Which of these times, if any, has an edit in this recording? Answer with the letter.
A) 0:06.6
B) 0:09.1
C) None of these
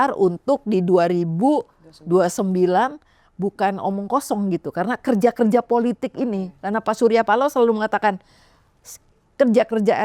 B